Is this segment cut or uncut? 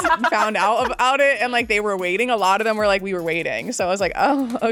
uncut